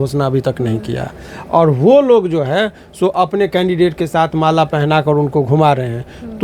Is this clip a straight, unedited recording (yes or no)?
yes